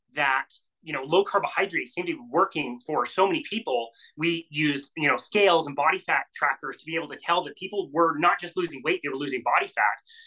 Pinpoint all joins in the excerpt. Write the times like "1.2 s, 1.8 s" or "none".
none